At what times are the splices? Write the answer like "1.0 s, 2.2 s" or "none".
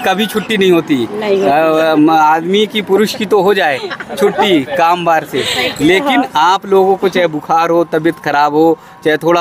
none